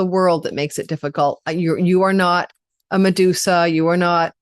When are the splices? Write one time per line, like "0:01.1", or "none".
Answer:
none

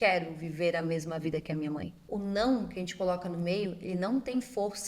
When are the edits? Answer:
0:02.0

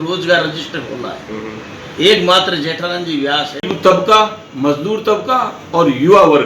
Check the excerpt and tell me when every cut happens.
0:03.5

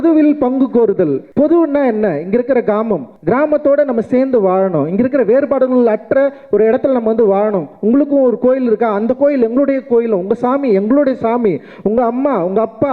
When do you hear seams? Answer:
0:01.2
0:03.1

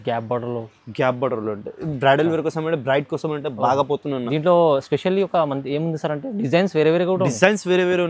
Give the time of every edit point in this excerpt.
none

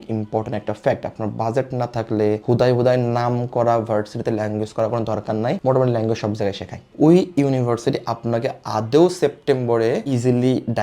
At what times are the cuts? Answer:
0:06.9

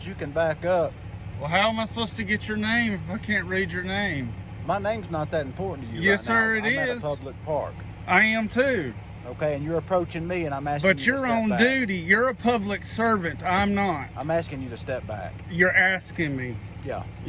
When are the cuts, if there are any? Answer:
none

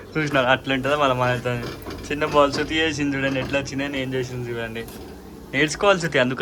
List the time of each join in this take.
none

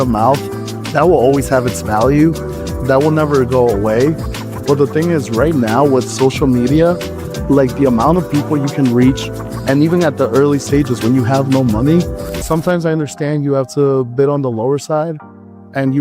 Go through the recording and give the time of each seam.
0:12.3

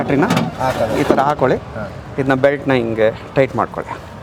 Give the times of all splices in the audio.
none

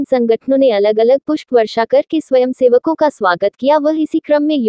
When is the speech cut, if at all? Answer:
0:03.4

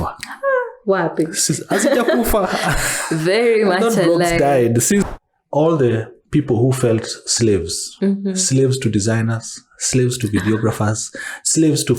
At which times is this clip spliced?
0:05.1

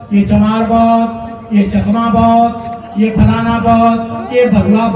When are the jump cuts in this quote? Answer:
none

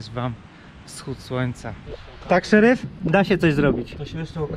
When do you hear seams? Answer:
0:02.0

